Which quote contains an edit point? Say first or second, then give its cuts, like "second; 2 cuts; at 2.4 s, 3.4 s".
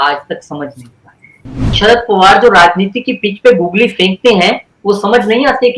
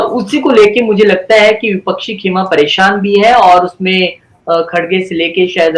first; 1 cut; at 1.7 s